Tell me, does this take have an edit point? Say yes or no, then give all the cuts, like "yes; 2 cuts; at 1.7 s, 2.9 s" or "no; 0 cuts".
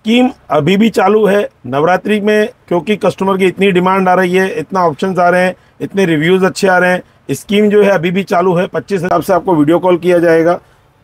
yes; 1 cut; at 9.1 s